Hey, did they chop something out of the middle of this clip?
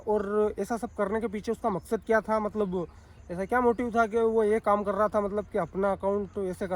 no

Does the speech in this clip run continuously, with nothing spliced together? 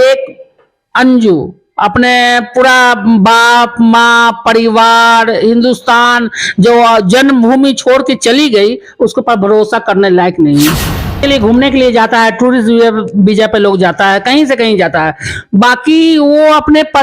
no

